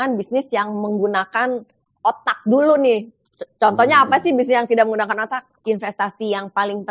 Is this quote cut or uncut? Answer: cut